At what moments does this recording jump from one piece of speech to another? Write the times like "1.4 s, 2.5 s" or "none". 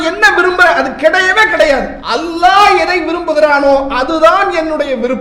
2.0 s